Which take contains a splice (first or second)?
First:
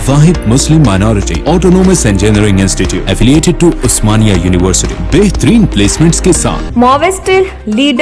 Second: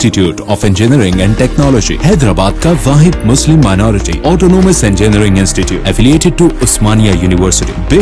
first